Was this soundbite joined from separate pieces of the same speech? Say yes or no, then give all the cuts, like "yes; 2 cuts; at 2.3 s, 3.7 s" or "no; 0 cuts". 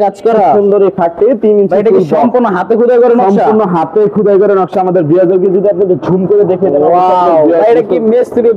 no; 0 cuts